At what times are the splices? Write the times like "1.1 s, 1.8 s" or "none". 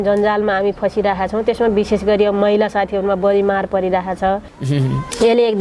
4.5 s